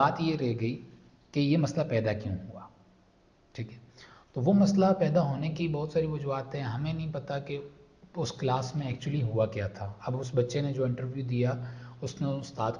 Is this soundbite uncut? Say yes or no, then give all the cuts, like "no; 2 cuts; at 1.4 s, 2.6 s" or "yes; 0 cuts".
yes; 0 cuts